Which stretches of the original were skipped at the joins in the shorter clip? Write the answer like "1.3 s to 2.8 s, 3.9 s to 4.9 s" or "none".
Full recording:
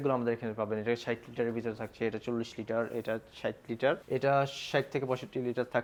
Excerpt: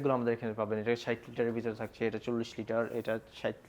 none